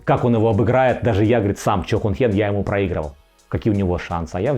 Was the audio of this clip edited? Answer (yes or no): no